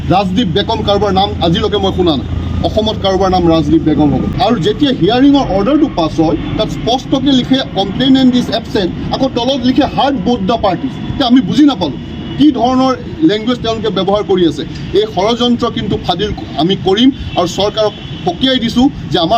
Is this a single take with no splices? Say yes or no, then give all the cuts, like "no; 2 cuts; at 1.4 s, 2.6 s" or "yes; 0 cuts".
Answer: no; 1 cut; at 4.3 s